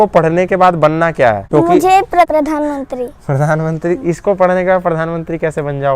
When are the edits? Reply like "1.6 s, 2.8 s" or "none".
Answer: 1.4 s, 2.3 s